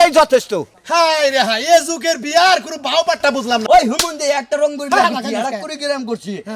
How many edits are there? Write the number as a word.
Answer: one